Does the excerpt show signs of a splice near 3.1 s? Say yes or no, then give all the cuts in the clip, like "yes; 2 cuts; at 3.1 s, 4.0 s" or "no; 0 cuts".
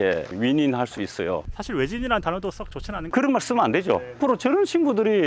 yes; 2 cuts; at 3.1 s, 4.2 s